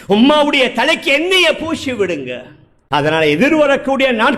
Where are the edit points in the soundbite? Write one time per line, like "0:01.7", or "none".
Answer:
0:02.8